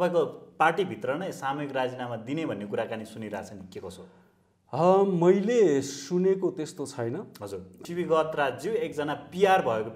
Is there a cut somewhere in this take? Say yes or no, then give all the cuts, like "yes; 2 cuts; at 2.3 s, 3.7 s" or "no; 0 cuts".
yes; 1 cut; at 7.8 s